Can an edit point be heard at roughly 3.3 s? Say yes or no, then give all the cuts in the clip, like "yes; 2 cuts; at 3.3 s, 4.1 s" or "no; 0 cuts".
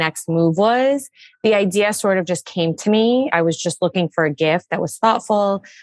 yes; 1 cut; at 3.3 s